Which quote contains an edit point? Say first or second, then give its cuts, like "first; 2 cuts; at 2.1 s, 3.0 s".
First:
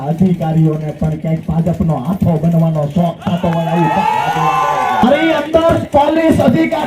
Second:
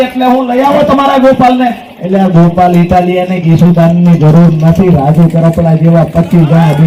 first; 1 cut; at 5.0 s